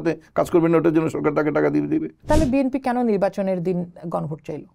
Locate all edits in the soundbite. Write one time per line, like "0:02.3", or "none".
0:02.2